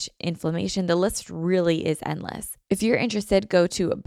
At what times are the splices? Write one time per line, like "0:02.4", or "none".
0:02.5